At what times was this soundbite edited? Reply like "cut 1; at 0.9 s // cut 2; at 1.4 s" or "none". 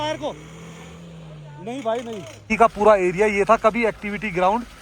cut 1; at 2.3 s